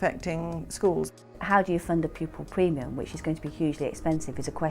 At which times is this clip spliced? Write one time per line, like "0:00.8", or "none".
0:01.4